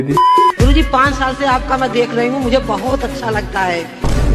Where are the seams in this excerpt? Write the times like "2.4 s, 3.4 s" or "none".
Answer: none

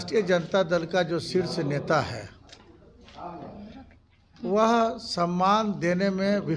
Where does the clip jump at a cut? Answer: none

